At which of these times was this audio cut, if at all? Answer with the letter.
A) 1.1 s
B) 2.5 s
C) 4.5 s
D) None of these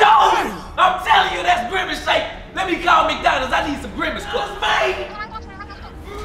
C